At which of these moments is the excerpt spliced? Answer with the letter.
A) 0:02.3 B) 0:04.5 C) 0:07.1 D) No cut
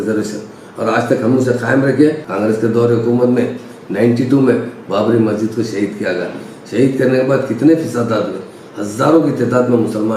A